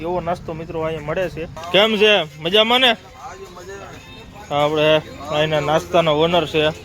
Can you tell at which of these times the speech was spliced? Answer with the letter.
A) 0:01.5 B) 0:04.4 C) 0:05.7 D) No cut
A